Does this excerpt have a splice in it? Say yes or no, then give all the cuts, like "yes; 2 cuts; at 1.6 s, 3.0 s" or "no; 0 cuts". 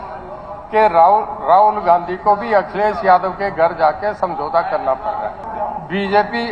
yes; 1 cut; at 5.5 s